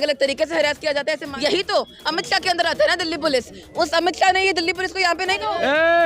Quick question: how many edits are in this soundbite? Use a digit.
2